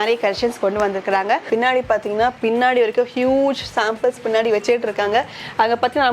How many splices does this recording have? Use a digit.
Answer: 1